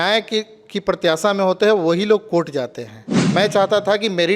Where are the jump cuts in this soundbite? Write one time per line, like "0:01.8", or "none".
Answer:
0:03.3